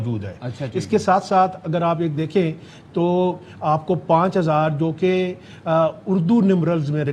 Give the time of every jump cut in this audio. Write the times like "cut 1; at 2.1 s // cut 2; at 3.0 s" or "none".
none